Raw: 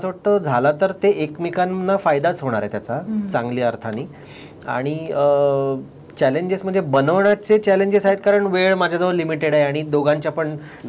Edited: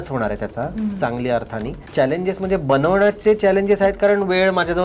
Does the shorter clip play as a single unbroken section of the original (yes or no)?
no